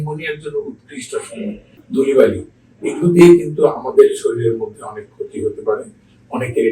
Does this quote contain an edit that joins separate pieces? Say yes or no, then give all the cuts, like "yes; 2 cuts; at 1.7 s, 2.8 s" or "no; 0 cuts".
yes; 1 cut; at 1.8 s